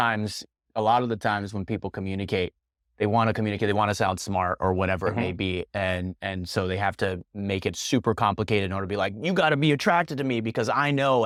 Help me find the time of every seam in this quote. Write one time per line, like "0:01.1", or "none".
none